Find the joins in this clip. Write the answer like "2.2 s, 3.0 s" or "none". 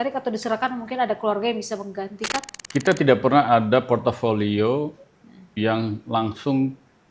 2.5 s

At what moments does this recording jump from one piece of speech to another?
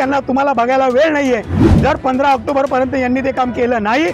1.6 s

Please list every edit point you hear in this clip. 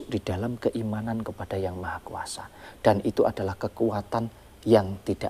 none

